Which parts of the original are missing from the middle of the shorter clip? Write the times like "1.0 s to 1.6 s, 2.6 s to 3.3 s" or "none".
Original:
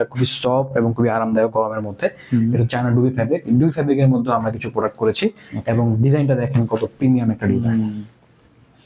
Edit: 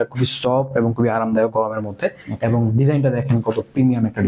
2.2 s to 5.5 s